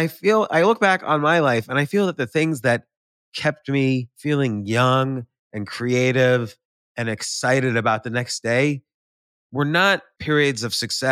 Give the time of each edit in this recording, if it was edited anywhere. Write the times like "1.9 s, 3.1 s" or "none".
4.1 s, 10.1 s